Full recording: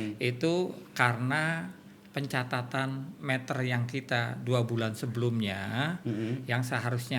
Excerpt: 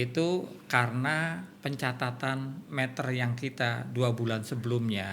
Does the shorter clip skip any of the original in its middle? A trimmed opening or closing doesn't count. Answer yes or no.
yes